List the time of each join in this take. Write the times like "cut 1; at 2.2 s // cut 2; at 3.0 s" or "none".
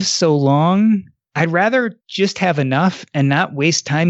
cut 1; at 1.2 s // cut 2; at 2.0 s